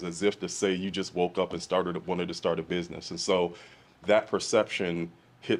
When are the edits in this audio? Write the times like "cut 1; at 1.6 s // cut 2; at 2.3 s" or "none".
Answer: none